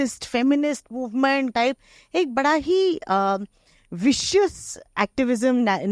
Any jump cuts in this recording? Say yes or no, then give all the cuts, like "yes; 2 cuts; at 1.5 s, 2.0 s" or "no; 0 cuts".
yes; 1 cut; at 1.5 s